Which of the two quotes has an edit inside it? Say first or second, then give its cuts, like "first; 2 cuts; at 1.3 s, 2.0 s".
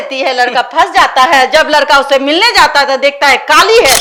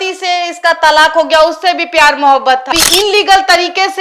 second; 1 cut; at 2.7 s